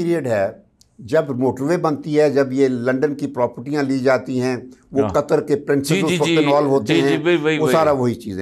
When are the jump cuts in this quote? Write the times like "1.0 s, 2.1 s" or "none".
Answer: none